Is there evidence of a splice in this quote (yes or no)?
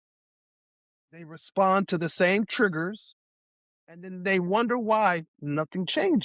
no